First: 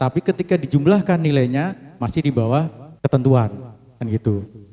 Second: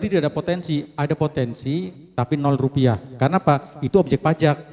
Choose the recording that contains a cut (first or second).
first